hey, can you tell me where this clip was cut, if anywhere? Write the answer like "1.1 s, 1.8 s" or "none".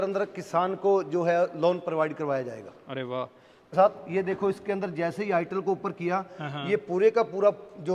3.7 s